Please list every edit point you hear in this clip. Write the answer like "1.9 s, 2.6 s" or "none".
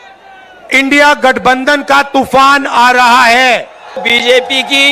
4.0 s